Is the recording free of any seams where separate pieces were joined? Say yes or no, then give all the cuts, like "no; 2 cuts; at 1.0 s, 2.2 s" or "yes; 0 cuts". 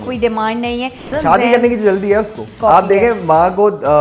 no; 2 cuts; at 1.1 s, 2.5 s